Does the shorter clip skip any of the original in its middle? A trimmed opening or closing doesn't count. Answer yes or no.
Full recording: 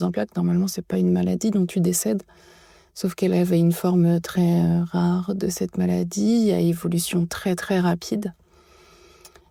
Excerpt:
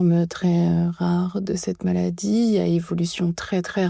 no